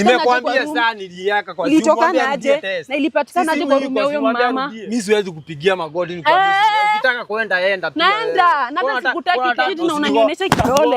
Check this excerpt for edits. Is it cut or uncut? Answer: cut